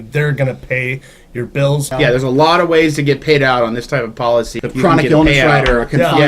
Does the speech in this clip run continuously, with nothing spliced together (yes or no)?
no